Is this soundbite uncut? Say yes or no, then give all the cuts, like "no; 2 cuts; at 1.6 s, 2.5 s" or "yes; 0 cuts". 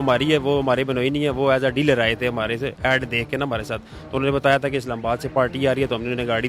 yes; 0 cuts